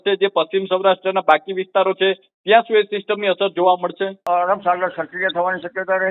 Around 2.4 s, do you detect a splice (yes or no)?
no